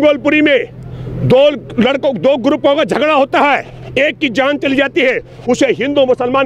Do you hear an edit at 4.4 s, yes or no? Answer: no